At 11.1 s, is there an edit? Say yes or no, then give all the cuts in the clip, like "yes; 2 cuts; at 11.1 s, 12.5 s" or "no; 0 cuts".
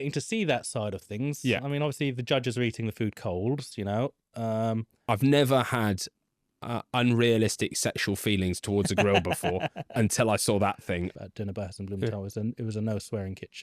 yes; 2 cuts; at 5.1 s, 11.1 s